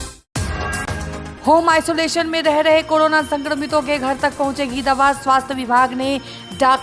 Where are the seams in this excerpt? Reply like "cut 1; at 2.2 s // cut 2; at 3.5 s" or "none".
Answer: cut 1; at 1.2 s